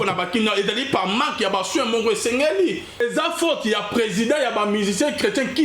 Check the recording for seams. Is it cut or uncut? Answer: cut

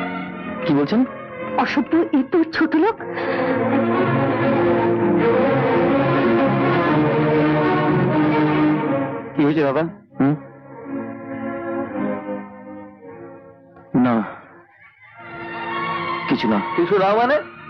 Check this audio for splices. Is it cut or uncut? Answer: uncut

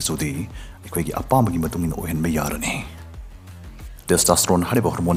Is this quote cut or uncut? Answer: uncut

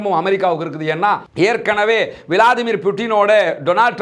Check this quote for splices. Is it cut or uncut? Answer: uncut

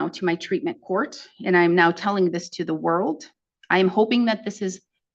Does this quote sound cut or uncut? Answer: uncut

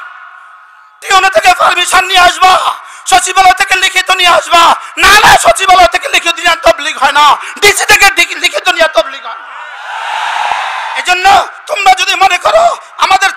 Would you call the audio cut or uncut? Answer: cut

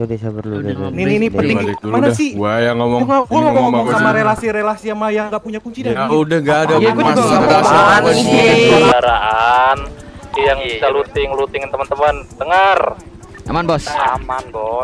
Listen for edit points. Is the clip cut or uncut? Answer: cut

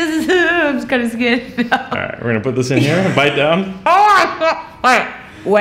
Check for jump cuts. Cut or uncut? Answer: uncut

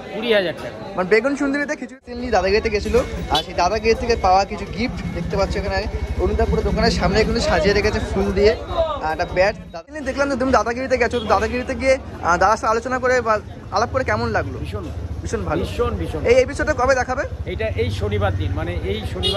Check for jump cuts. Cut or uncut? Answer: cut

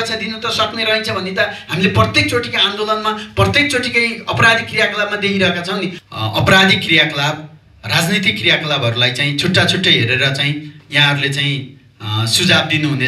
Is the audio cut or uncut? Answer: cut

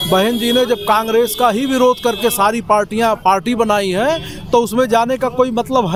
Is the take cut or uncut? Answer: uncut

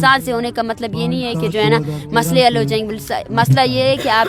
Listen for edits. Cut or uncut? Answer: uncut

